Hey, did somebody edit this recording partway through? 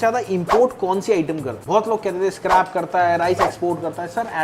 yes; 1 cut; at 1.5 s

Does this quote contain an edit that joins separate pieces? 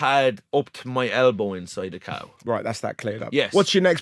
no; 0 cuts

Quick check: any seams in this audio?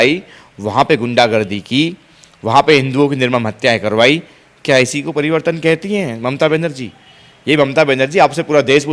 no; 0 cuts

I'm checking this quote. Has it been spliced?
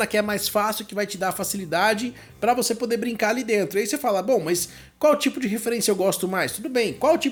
no; 0 cuts

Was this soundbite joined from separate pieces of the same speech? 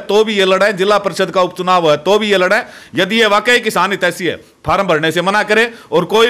no; 0 cuts

